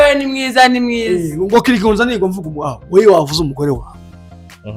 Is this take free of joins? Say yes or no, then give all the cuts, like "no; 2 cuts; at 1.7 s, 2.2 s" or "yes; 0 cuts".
yes; 0 cuts